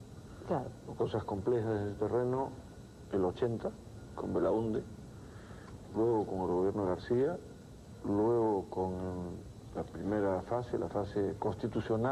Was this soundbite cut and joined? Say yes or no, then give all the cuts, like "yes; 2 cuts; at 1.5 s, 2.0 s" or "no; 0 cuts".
no; 0 cuts